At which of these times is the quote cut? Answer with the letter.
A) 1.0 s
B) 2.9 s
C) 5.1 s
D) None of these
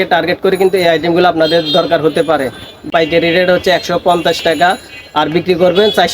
B